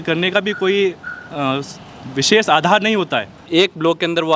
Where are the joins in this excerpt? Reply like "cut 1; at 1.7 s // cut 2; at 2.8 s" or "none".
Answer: cut 1; at 3.4 s

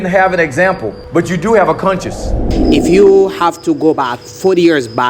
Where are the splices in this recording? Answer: cut 1; at 0.9 s // cut 2; at 2.4 s

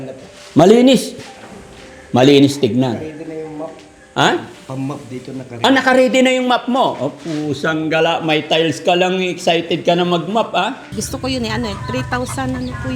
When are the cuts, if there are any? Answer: cut 1; at 10.8 s

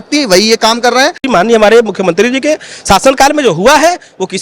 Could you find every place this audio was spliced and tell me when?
cut 1; at 1.2 s

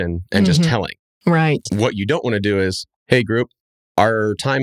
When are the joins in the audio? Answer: cut 1; at 1.6 s

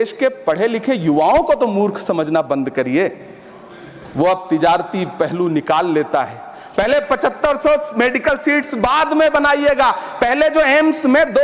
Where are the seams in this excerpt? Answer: none

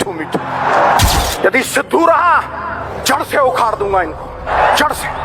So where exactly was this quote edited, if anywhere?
cut 1; at 1.2 s // cut 2; at 2.9 s // cut 3; at 4.5 s

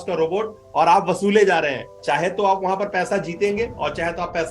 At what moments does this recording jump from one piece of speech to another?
cut 1; at 1.9 s

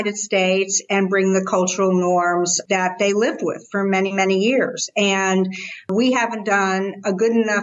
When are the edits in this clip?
cut 1; at 2.6 s // cut 2; at 5.9 s

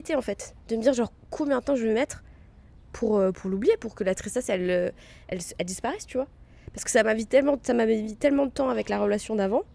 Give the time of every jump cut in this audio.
none

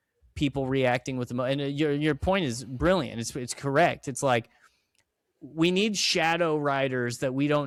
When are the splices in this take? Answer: none

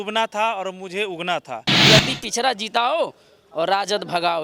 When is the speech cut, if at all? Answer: cut 1; at 1.7 s

